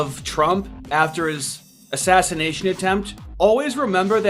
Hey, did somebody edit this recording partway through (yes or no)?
yes